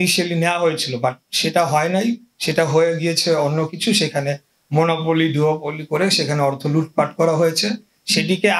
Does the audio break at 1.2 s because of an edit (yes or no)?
no